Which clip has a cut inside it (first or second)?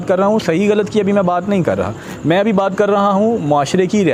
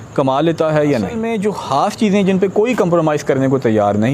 second